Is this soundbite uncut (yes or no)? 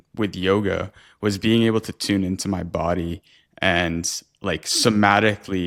yes